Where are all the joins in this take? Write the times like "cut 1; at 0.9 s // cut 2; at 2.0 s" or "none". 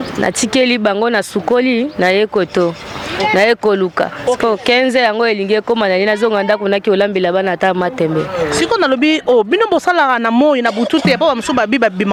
none

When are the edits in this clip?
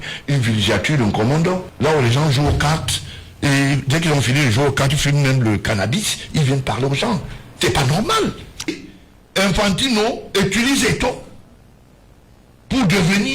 cut 1; at 1.7 s // cut 2; at 8.7 s

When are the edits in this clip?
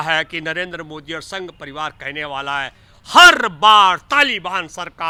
none

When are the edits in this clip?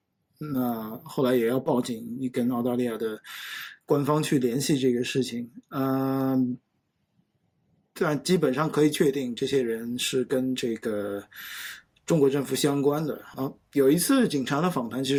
none

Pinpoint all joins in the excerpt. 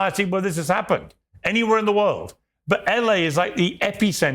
none

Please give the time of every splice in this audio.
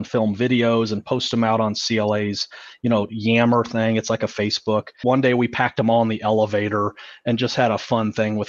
cut 1; at 4.9 s

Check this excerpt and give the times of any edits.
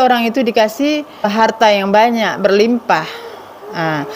cut 1; at 1.3 s

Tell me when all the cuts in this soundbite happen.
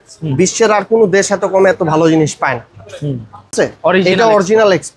cut 1; at 3.5 s

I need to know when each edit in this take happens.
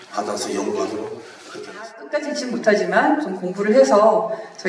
cut 1; at 2.0 s

